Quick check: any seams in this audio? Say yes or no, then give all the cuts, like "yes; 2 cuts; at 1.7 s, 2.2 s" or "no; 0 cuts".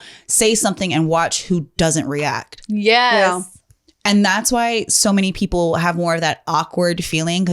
no; 0 cuts